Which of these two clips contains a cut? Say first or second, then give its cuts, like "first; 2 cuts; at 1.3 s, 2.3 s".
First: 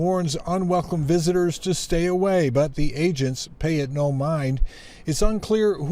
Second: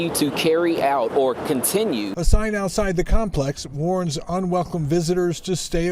second; 1 cut; at 2.1 s